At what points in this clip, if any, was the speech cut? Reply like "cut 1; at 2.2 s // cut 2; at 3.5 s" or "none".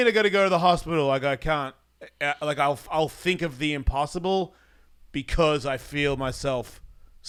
none